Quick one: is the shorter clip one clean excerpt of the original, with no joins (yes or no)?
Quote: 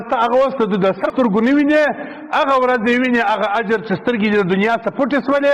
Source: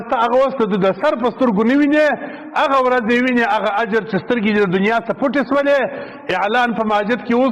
no